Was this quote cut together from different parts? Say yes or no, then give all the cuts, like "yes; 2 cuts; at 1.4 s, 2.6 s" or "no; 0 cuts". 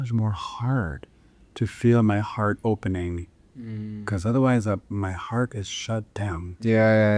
no; 0 cuts